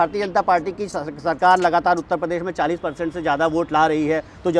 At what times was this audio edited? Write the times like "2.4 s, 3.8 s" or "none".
none